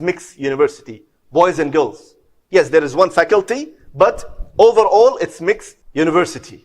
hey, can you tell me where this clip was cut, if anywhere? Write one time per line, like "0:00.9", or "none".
0:05.8